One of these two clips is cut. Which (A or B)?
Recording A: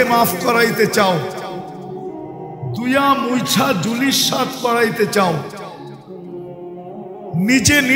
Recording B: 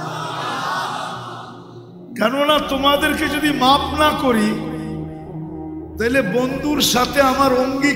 A